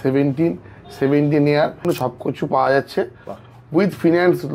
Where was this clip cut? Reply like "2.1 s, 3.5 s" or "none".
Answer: 1.8 s